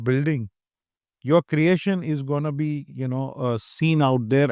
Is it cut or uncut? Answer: uncut